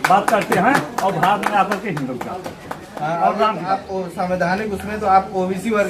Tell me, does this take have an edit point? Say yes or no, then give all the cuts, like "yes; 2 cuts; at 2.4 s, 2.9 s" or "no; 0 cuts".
yes; 1 cut; at 3.8 s